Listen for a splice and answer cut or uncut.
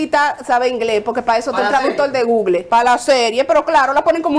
cut